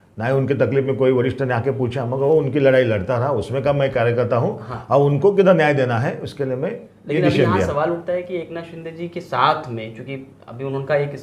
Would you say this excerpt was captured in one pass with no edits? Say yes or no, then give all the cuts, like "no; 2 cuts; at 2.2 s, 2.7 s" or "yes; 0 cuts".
yes; 0 cuts